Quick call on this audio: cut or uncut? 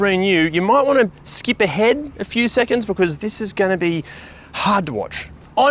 uncut